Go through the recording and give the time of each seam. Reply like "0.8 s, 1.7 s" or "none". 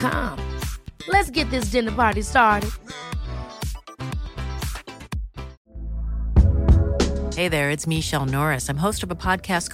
5.6 s